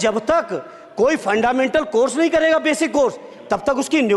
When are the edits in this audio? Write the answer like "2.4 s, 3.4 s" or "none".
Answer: none